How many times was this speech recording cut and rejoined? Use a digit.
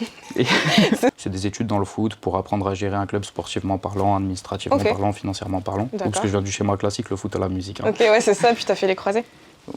1